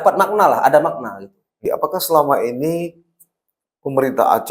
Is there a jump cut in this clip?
yes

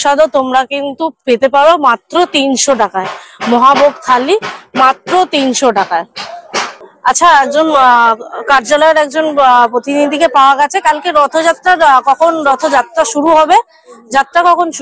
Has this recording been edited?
no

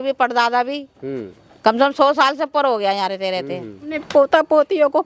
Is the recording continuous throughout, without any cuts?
no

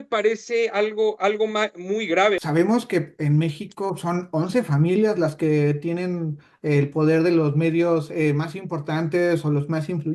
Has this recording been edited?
yes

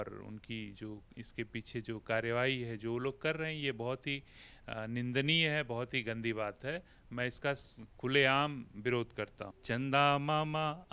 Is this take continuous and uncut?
no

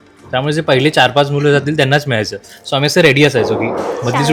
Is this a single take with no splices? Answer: yes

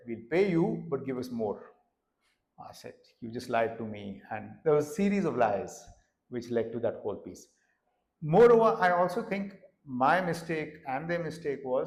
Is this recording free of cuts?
yes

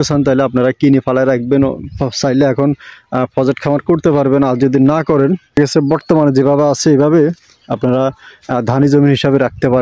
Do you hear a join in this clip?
yes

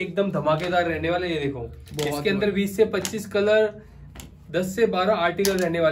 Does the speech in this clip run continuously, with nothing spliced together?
yes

